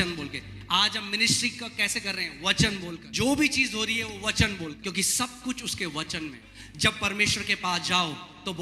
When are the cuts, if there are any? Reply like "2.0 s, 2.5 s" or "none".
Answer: 3.0 s, 4.8 s, 6.5 s